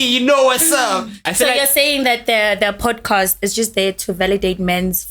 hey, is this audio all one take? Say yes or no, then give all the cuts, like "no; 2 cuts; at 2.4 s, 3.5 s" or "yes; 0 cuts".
no; 1 cut; at 1.1 s